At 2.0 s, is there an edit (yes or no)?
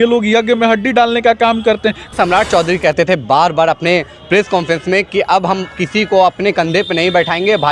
yes